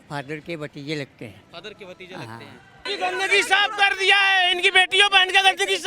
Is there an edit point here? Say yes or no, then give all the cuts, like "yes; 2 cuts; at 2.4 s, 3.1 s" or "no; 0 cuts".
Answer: yes; 1 cut; at 2.9 s